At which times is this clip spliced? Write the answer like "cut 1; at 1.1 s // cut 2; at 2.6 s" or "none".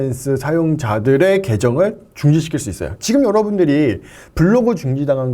none